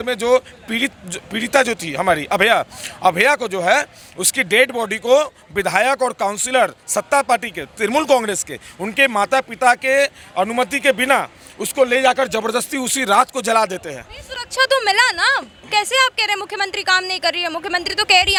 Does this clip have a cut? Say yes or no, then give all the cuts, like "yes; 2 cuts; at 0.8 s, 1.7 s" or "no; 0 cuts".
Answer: no; 0 cuts